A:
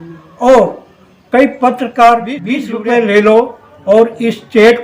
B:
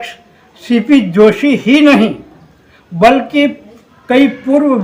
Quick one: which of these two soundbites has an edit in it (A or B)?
A